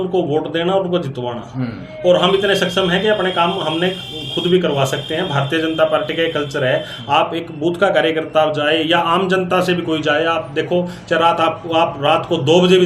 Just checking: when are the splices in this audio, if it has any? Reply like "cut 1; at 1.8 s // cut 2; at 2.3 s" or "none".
none